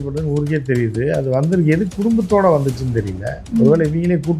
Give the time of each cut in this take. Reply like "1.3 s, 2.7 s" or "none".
none